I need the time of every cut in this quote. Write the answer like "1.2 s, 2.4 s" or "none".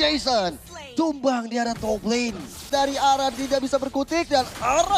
2.7 s